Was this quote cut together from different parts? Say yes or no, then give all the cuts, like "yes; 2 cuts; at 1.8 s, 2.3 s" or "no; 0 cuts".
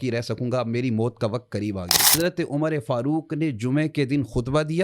yes; 1 cut; at 2.1 s